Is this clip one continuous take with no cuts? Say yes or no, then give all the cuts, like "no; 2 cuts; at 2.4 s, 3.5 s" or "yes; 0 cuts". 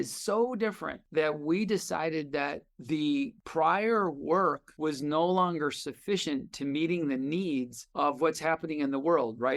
no; 3 cuts; at 0.9 s, 3.4 s, 4.7 s